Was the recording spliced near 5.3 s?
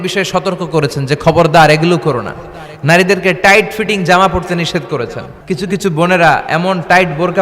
yes; 1 cut; at 5.3 s

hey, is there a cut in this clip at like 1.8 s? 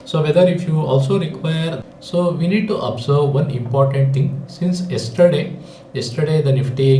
yes; 1 cut; at 1.8 s

